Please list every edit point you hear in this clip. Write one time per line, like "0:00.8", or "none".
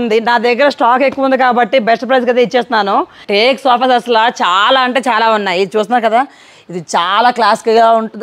0:03.2